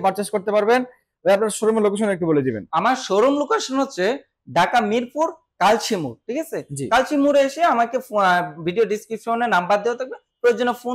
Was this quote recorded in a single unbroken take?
yes; 0 cuts

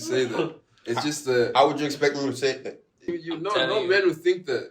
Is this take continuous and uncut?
no; 1 cut; at 3.1 s

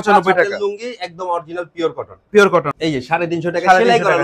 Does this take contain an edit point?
yes; 1 cut; at 2.7 s

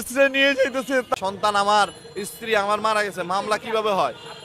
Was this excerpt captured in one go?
no; 1 cut; at 1.1 s

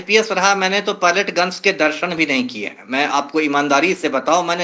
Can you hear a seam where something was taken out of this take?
no; 0 cuts

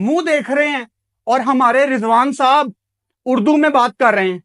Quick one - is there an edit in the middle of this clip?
no; 0 cuts

